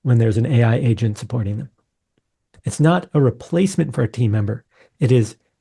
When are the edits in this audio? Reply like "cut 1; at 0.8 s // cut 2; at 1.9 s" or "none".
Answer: none